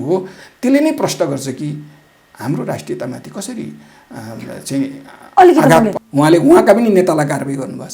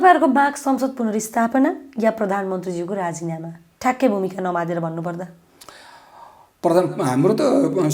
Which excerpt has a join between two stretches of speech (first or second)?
first